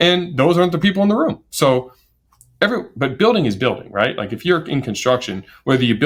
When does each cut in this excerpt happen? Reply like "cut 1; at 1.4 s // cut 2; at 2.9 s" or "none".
none